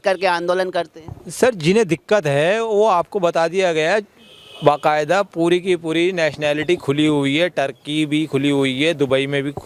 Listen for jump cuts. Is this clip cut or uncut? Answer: uncut